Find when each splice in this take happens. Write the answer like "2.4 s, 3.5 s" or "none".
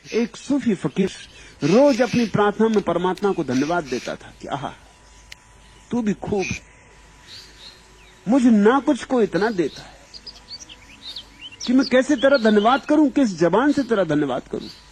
1.0 s